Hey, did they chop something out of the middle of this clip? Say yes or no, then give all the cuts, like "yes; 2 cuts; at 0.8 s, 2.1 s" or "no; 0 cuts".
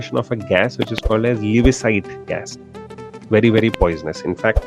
no; 0 cuts